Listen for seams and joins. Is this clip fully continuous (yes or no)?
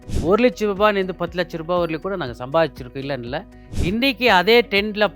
no